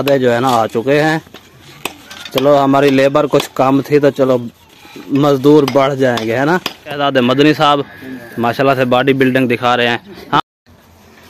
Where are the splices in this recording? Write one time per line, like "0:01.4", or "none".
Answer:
0:07.0
0:10.4